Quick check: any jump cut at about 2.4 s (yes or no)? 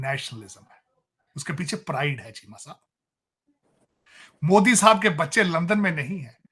no